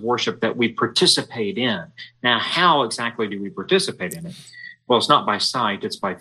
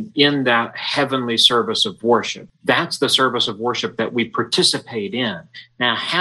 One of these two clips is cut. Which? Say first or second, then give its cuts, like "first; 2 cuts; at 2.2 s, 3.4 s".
second; 1 cut; at 2.4 s